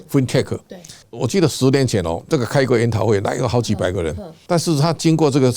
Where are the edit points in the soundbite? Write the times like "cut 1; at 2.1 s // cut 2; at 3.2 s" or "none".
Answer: none